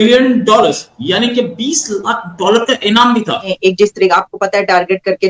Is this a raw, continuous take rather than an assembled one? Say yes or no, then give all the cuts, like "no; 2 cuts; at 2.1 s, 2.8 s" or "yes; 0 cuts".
no; 1 cut; at 3.5 s